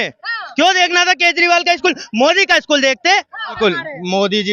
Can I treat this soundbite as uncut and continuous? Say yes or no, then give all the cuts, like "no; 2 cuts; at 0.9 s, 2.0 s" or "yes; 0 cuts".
no; 1 cut; at 3.6 s